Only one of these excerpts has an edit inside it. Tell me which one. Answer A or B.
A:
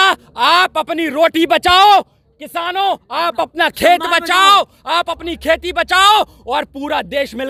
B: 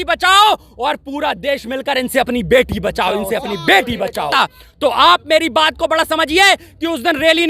B